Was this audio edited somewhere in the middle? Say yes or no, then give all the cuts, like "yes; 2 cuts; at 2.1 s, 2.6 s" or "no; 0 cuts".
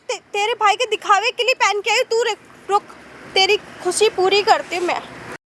no; 0 cuts